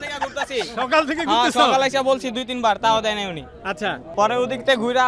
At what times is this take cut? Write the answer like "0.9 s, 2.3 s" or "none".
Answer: 4.0 s